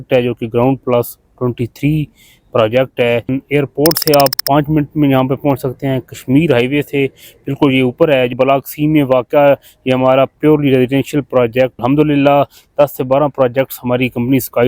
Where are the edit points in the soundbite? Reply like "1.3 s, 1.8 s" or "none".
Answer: 3.3 s, 8.3 s, 11.8 s